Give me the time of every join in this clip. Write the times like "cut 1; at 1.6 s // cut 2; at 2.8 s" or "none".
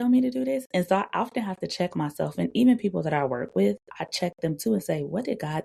none